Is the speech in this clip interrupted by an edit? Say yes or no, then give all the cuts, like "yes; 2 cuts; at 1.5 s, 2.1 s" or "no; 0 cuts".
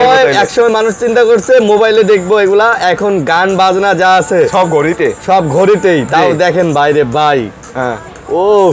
no; 0 cuts